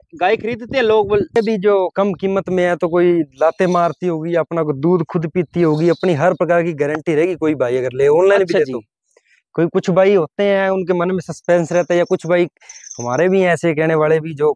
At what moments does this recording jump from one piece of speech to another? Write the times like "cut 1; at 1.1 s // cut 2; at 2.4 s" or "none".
cut 1; at 1.3 s